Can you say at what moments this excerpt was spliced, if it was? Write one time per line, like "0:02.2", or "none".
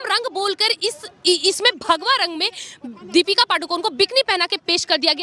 none